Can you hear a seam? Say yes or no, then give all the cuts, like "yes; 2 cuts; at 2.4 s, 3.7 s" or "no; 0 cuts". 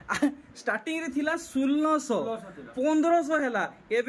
no; 0 cuts